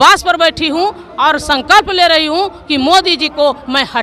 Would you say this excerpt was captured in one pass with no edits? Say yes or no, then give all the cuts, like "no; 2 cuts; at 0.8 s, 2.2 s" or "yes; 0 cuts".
yes; 0 cuts